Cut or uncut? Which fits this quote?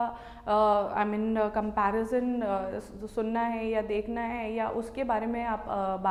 uncut